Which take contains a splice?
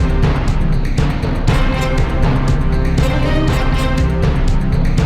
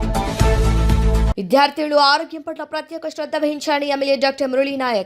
second; 1 cut; at 1.3 s

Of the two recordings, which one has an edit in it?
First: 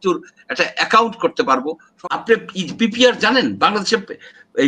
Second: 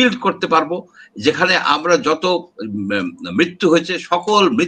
first; 1 cut; at 1.9 s

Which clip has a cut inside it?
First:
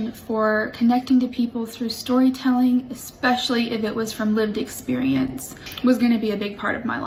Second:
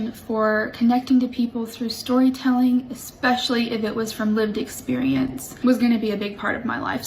second; 1 cut; at 5.4 s

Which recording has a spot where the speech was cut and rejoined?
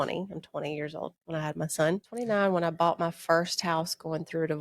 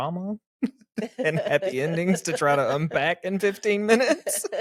first; 1 cut; at 2.2 s

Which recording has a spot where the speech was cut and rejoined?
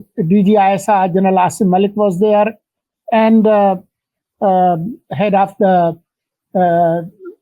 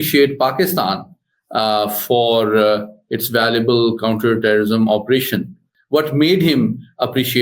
second; 1 cut; at 5.7 s

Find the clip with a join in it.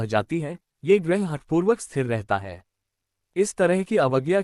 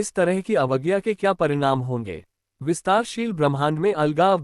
second; 1 cut; at 2.5 s

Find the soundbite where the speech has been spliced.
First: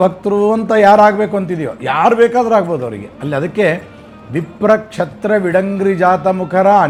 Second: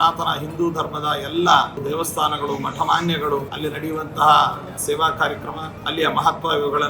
second; 4 cuts; at 1.8 s, 3.5 s, 4.8 s, 5.7 s

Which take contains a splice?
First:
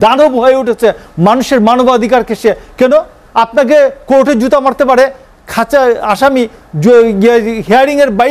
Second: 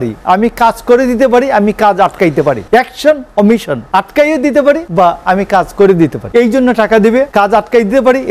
second; 5 cuts; at 2.6 s, 3.8 s, 4.9 s, 6.2 s, 7.3 s

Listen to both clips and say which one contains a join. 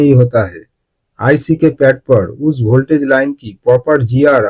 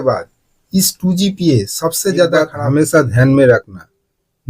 second; 1 cut; at 2.5 s

